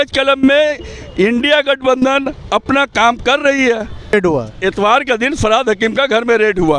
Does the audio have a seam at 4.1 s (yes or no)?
yes